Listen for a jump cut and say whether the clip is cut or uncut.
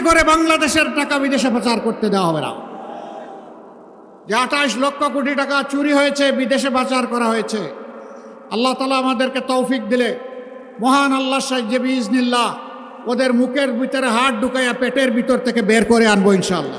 uncut